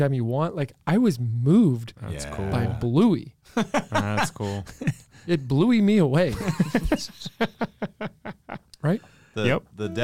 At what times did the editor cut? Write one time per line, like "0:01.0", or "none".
none

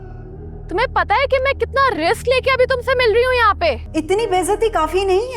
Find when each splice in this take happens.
0:03.8

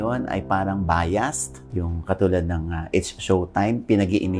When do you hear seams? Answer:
0:01.6

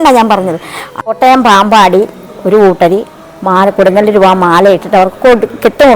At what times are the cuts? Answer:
0:01.1

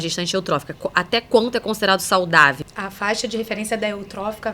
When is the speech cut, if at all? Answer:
0:02.6

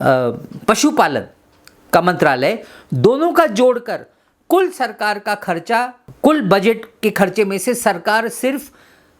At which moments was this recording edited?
0:06.0

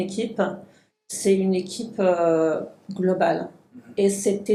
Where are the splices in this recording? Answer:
none

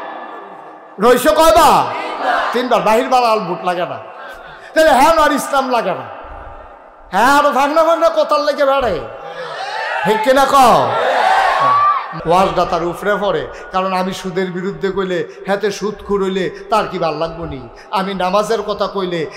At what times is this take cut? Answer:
0:12.1

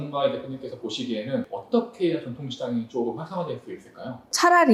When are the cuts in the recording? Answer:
none

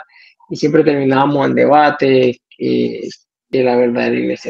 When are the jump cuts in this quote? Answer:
0:03.3

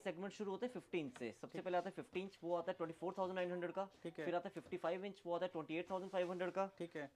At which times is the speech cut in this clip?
none

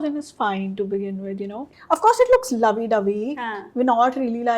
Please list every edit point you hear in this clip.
0:01.7

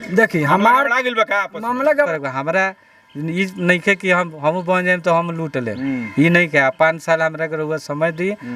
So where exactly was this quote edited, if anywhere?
0:02.1

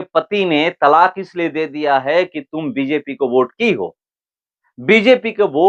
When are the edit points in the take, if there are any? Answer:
none

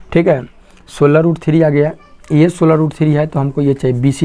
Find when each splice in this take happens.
none

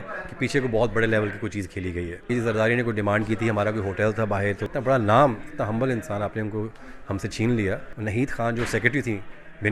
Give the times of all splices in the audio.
0:02.3
0:04.7
0:07.9

